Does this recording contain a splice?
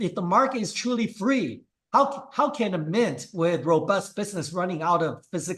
no; 0 cuts

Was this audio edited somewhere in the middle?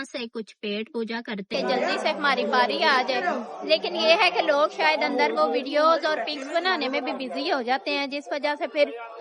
yes; 1 cut; at 1.5 s

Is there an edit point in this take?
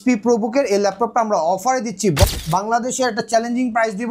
yes; 1 cut; at 2.3 s

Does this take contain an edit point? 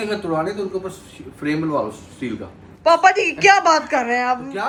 no; 0 cuts

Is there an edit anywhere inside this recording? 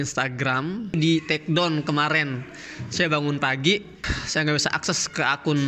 yes; 1 cut; at 1.0 s

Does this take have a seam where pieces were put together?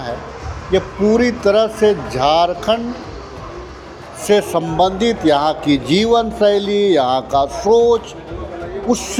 no; 0 cuts

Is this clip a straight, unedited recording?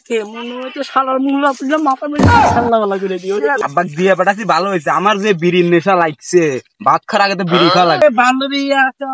no; 2 cuts; at 3.6 s, 8.0 s

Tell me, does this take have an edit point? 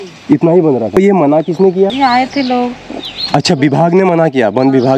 yes; 2 cuts; at 1.0 s, 1.9 s

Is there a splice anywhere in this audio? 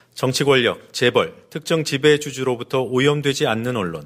yes; 1 cut; at 3.1 s

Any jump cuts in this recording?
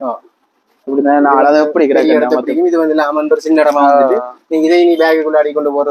no; 0 cuts

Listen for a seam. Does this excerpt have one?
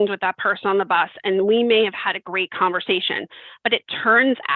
no; 0 cuts

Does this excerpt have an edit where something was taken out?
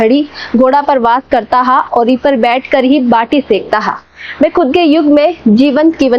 no; 0 cuts

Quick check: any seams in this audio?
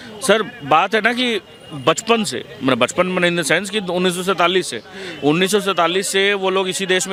no; 0 cuts

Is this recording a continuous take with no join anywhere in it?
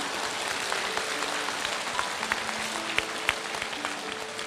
yes; 0 cuts

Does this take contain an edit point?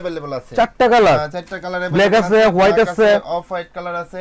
no; 0 cuts

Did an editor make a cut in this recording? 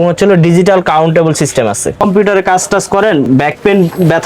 yes; 2 cuts; at 2.0 s, 3.3 s

